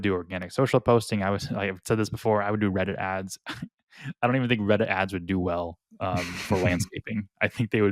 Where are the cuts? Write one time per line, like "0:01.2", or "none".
none